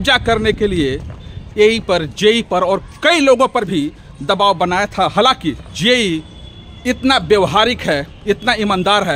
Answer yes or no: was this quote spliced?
yes